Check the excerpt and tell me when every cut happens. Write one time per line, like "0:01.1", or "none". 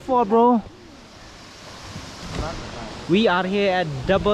0:02.9